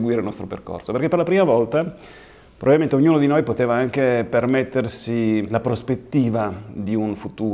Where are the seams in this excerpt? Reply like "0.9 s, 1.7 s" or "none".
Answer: 5.5 s